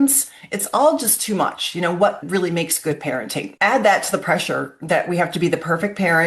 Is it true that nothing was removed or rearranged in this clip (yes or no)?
no